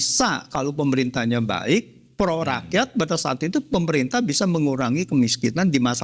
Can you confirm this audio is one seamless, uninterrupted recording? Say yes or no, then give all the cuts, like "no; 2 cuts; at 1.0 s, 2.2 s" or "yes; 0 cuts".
yes; 0 cuts